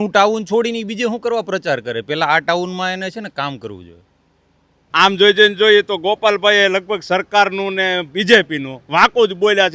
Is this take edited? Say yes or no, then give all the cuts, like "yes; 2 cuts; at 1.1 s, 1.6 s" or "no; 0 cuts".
yes; 1 cut; at 4.8 s